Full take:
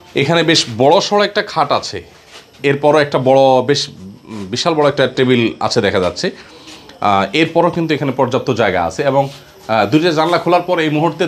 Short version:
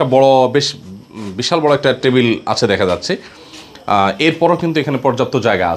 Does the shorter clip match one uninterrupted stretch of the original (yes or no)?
yes